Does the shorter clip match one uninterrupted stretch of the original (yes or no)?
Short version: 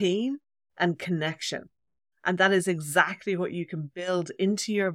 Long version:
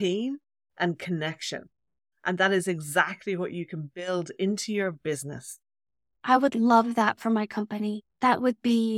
yes